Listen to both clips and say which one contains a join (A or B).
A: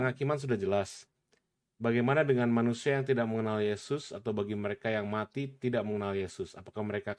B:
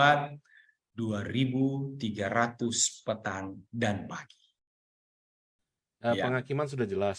B